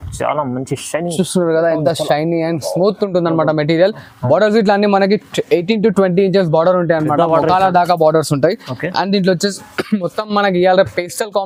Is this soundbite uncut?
yes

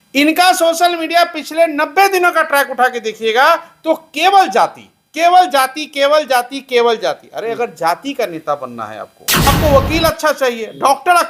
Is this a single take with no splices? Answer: no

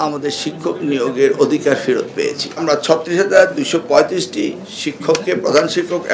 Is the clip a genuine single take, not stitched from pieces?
no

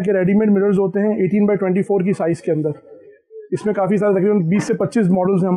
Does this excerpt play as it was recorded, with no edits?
yes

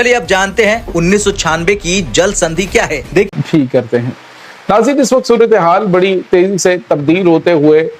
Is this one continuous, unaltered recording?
no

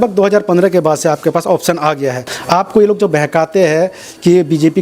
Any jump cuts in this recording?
yes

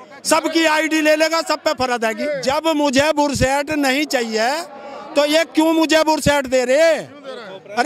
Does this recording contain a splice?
yes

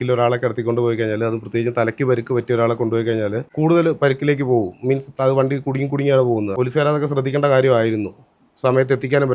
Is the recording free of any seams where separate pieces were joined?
no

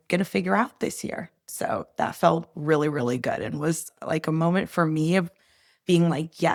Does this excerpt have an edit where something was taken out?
no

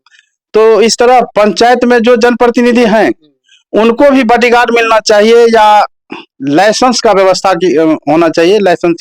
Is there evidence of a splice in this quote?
no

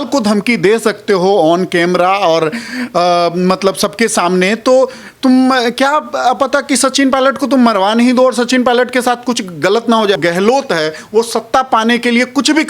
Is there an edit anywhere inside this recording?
yes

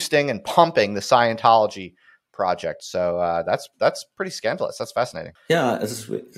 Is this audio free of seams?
no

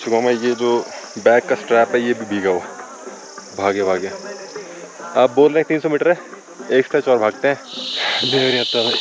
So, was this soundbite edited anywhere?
no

